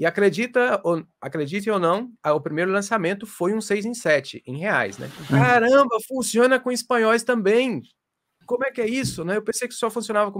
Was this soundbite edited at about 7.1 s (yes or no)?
no